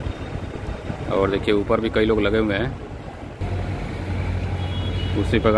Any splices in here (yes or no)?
no